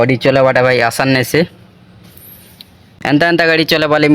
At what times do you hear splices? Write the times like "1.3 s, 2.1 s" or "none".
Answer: 2.8 s